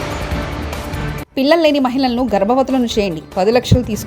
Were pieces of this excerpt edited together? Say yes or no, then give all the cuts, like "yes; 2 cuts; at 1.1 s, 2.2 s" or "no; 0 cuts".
yes; 1 cut; at 1.2 s